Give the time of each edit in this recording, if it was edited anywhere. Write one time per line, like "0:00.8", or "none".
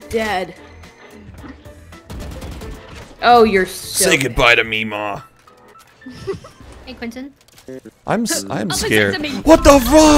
0:06.5